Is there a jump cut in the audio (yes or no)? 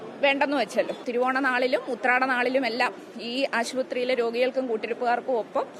yes